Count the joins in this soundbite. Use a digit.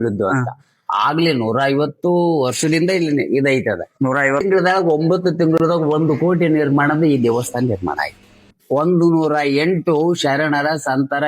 2